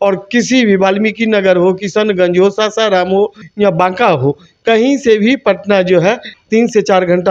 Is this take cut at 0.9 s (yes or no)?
no